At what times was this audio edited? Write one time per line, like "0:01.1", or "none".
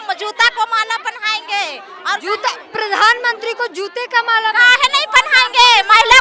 none